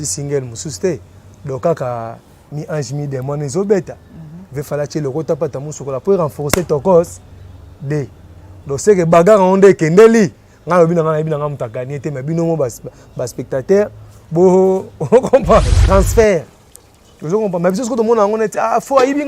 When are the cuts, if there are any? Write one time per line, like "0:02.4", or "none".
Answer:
0:15.8